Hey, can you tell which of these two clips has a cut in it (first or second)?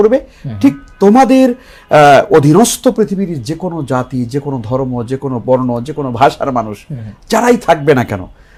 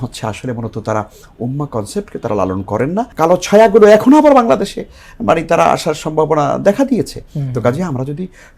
second